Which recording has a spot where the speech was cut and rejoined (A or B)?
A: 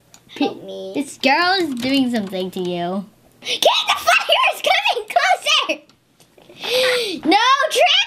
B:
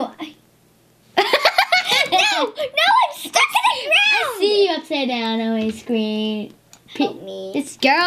A